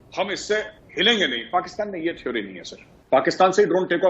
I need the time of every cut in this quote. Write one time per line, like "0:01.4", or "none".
0:02.9